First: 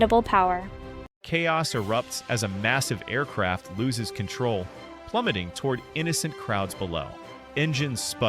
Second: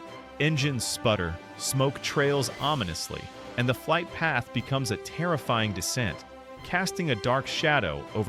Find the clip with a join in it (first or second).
first